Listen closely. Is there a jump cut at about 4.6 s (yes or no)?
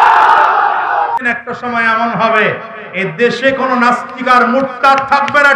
no